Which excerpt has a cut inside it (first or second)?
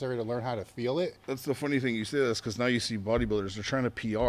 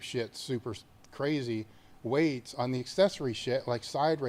first